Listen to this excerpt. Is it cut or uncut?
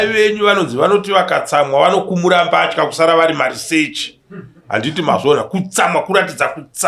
uncut